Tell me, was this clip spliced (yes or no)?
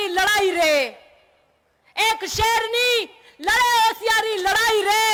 no